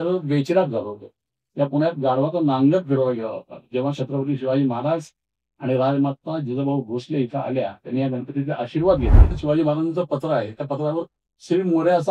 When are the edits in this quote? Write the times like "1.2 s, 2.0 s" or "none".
9.4 s

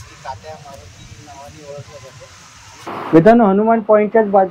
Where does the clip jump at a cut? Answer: 2.9 s

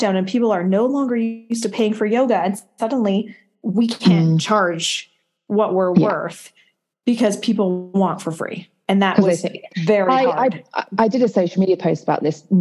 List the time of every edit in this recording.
none

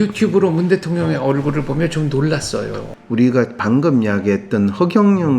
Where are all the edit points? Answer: 2.8 s

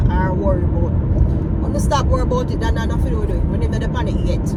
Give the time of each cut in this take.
none

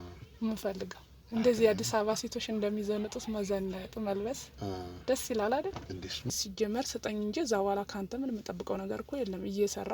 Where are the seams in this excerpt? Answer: 6.3 s

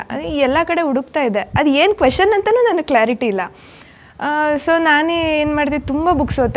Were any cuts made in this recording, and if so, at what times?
none

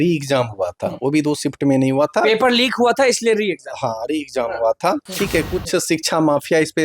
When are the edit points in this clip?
5.1 s

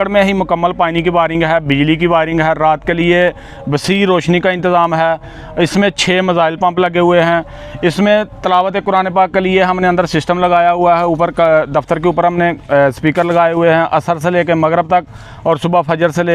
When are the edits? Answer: none

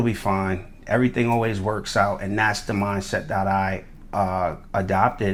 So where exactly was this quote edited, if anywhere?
none

